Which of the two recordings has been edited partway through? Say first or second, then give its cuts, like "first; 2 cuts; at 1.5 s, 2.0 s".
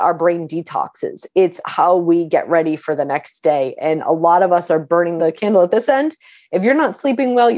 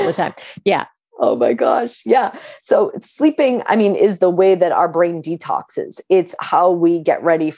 first; 1 cut; at 5.2 s